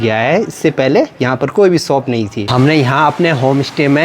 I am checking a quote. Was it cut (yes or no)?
yes